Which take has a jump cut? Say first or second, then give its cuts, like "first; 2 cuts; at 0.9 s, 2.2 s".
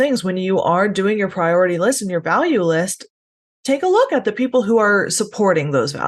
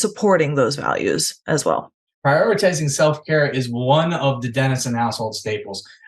second; 1 cut; at 2.0 s